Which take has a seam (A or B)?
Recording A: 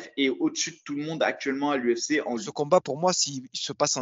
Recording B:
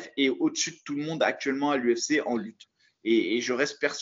A